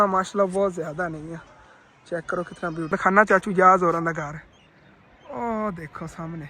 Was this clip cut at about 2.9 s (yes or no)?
yes